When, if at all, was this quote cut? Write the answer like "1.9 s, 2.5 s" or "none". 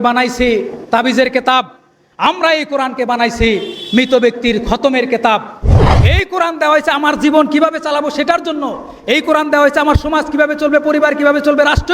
5.7 s